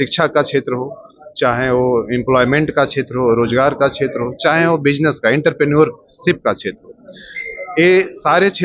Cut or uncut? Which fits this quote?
uncut